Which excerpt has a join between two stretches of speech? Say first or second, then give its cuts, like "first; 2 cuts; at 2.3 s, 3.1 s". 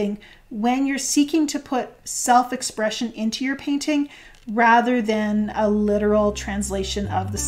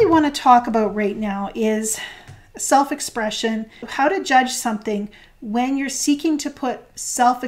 second; 1 cut; at 3.8 s